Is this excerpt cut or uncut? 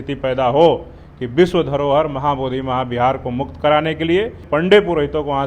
cut